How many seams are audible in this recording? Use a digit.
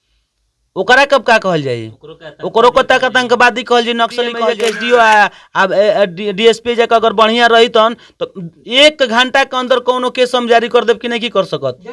1